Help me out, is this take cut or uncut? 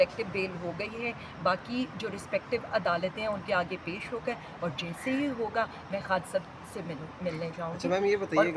uncut